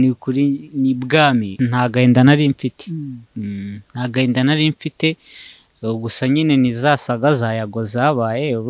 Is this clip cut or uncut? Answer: cut